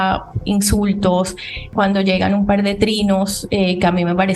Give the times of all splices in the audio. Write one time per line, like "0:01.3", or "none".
0:01.7